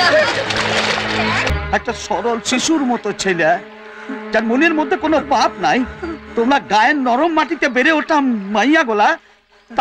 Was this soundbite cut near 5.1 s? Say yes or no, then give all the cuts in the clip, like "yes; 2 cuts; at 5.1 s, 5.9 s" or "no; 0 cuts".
no; 1 cut; at 1.5 s